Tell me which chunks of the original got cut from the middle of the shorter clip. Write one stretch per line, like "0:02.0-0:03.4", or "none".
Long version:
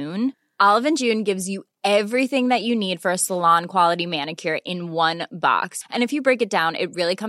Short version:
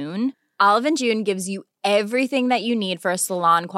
none